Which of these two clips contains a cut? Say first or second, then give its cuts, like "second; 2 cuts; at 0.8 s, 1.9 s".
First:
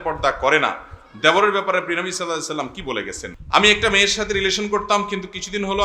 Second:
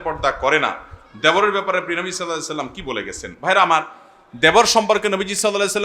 first; 1 cut; at 3.3 s